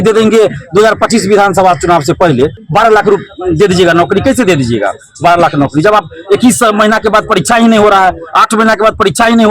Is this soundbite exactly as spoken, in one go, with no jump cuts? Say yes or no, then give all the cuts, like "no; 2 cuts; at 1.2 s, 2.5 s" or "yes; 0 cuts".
no; 1 cut; at 2.6 s